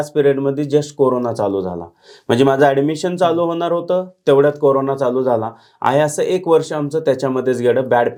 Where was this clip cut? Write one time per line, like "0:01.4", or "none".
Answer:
none